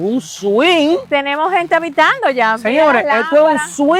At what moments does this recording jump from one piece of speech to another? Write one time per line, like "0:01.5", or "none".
none